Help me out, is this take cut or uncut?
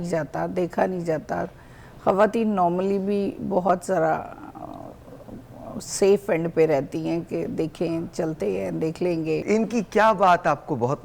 cut